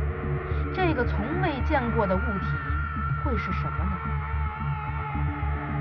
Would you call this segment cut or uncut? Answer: cut